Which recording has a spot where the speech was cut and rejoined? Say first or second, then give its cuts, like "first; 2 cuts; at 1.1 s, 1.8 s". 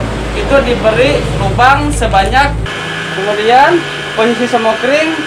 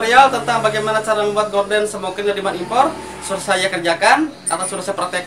first; 1 cut; at 2.7 s